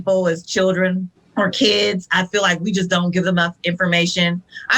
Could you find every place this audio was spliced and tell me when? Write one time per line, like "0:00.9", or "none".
0:01.2